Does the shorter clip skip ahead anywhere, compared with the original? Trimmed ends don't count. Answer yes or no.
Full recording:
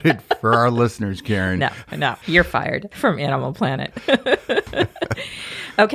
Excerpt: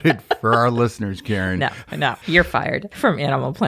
no